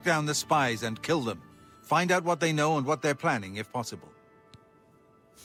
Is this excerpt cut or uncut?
uncut